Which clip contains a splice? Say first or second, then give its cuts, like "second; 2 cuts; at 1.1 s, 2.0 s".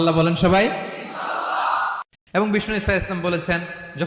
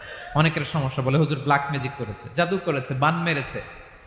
first; 1 cut; at 2.1 s